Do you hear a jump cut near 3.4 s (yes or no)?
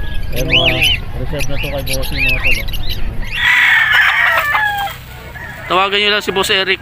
yes